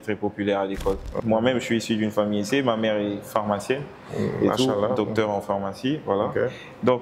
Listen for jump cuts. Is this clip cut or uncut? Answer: cut